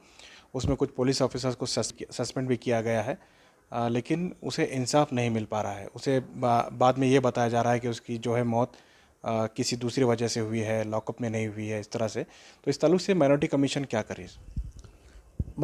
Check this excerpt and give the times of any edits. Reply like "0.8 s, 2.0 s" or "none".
1.9 s